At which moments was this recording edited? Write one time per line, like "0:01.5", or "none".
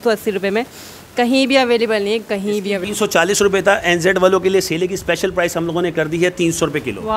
0:02.9